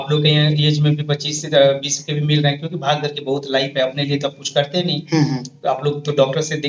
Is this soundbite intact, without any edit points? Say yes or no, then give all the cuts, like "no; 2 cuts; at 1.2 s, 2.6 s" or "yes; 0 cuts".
yes; 0 cuts